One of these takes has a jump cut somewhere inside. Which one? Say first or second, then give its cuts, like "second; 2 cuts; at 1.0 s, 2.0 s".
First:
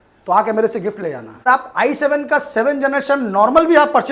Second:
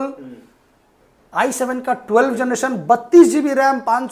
first; 1 cut; at 1.5 s